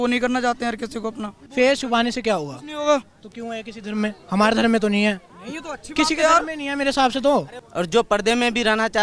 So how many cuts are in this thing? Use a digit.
2